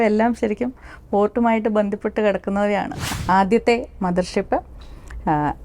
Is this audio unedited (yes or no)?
no